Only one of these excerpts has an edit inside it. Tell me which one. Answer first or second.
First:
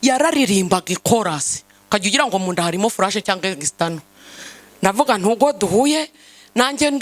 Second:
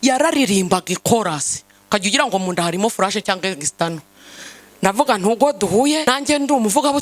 second